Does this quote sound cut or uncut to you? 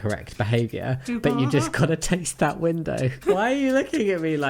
cut